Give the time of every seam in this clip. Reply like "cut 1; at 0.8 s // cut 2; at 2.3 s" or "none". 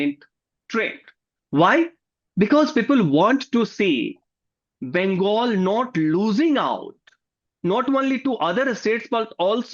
none

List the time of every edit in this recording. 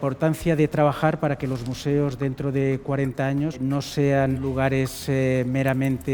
cut 1; at 3.6 s // cut 2; at 4.4 s

